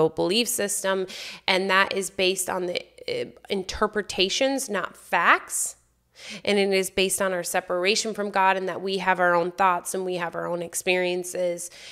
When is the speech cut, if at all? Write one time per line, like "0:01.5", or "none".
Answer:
none